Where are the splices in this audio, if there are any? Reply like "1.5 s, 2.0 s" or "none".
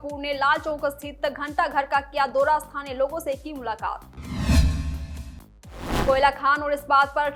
none